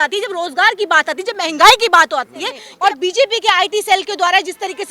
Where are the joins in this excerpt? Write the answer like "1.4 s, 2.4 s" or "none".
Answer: 2.6 s